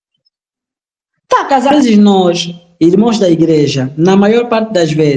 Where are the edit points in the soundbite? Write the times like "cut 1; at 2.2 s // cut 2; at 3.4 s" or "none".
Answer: cut 1; at 1.7 s

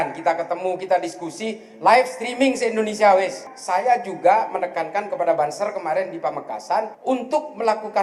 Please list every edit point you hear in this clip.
cut 1; at 3.5 s // cut 2; at 6.9 s

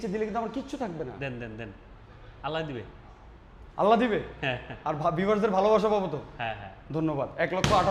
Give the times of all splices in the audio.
none

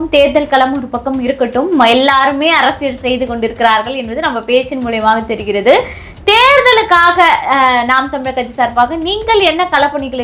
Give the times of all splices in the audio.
none

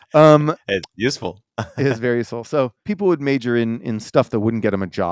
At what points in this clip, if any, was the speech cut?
cut 1; at 2.9 s

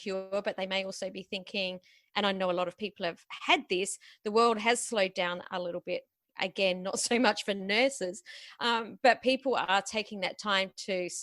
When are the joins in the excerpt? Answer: none

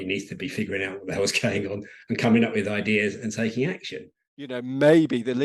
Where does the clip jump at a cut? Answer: cut 1; at 4.5 s

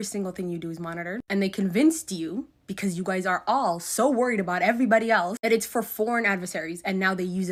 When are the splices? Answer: none

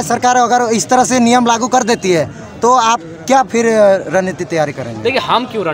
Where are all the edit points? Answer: none

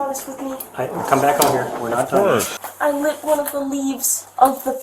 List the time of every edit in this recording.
cut 1; at 2.6 s

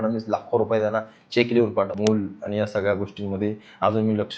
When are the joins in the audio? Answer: cut 1; at 1.9 s

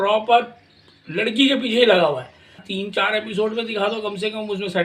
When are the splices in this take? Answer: cut 1; at 2.6 s

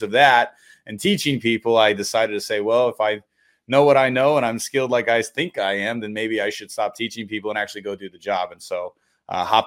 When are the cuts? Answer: none

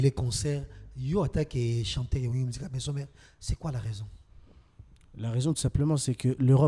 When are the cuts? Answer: none

